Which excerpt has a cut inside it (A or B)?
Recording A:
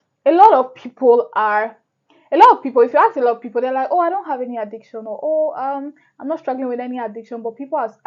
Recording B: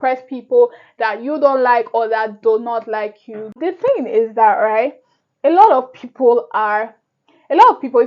B